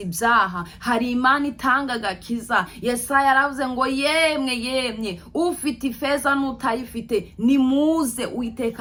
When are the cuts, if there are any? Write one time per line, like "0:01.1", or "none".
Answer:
none

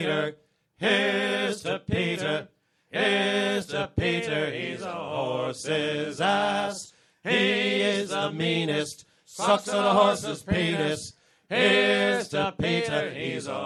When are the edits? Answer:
none

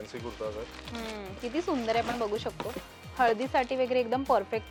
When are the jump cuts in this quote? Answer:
none

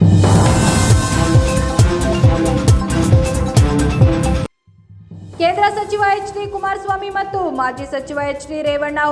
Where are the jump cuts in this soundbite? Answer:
none

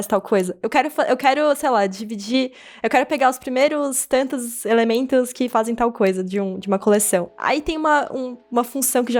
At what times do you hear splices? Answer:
none

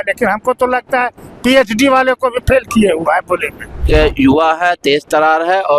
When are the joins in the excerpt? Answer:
0:03.8

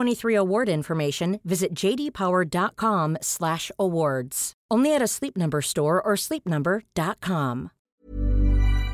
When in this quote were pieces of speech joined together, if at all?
0:07.8

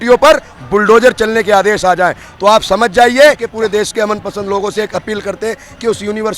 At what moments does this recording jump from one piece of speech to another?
0:03.5

